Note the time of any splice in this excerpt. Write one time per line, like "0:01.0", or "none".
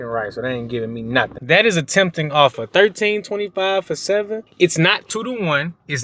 0:01.4
0:04.4

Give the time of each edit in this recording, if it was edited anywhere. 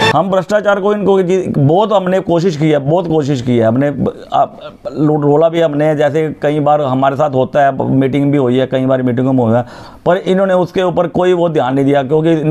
none

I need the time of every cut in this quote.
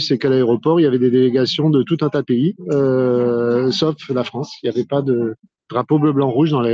none

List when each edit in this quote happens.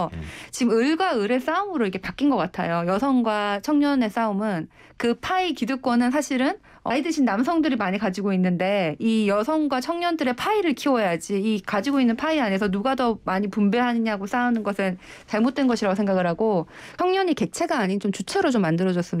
0:06.9
0:16.8

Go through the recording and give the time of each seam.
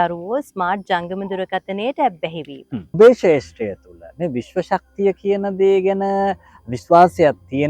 0:02.9

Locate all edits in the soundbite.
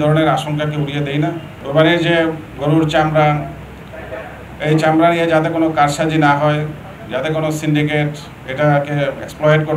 0:01.6

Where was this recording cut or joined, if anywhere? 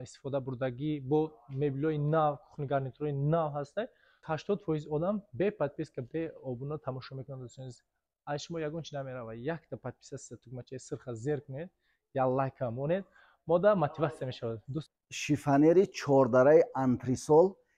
0:04.2
0:14.9

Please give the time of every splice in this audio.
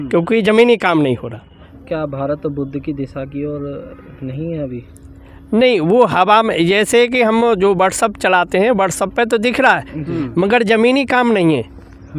0:01.7

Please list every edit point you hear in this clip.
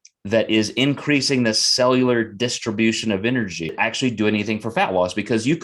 0:03.7

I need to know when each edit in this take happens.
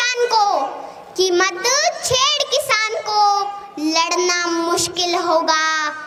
none

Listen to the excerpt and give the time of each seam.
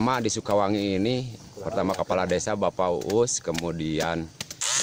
none

